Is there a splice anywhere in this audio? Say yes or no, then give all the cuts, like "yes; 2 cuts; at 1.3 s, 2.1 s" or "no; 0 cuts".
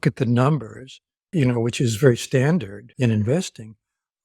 yes; 2 cuts; at 1.3 s, 2.8 s